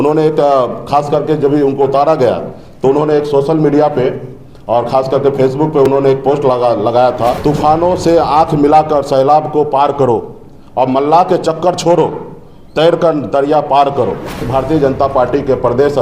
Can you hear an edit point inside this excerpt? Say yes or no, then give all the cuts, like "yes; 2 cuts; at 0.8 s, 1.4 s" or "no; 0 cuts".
yes; 2 cuts; at 7.4 s, 14.5 s